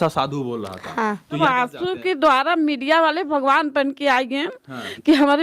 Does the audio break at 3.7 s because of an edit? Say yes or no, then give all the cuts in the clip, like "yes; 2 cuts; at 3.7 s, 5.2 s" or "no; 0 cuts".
no; 1 cut; at 1.4 s